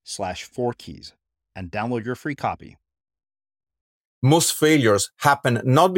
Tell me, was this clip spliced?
yes; 1 cut; at 4.0 s

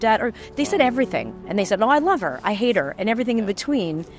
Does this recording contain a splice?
no; 0 cuts

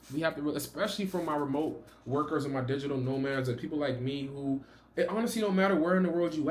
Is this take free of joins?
yes; 0 cuts

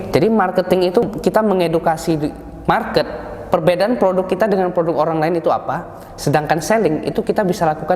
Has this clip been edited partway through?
yes; 1 cut; at 1.0 s

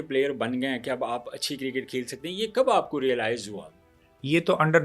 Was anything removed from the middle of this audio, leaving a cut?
no; 0 cuts

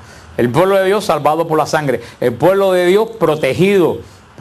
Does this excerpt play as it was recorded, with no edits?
no; 1 cut; at 1.5 s

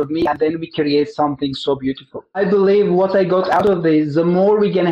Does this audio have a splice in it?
yes; 1 cut; at 2.4 s

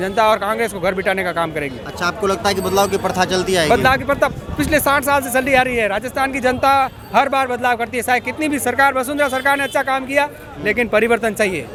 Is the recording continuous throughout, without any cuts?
yes; 0 cuts

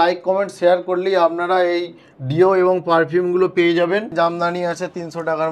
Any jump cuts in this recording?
yes; 1 cut; at 4.1 s

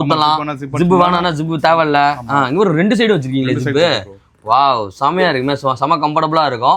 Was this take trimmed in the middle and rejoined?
no; 0 cuts

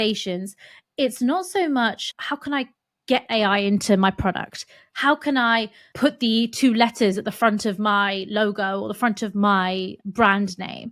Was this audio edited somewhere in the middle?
yes; 3 cuts; at 2.1 s, 5.8 s, 10.0 s

